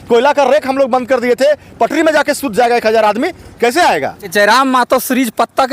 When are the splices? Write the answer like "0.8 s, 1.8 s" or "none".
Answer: 4.2 s